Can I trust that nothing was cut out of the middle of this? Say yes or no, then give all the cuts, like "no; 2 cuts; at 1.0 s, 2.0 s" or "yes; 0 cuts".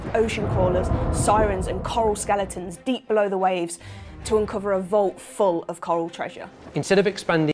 yes; 0 cuts